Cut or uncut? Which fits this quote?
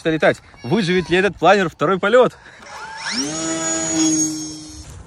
uncut